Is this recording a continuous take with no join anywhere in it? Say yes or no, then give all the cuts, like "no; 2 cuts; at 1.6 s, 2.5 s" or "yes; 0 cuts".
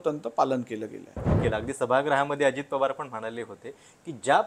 no; 1 cut; at 1.3 s